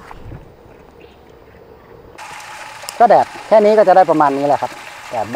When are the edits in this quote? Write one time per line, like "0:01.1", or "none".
0:02.2